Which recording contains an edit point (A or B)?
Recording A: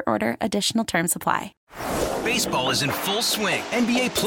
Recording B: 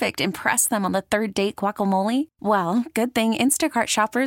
A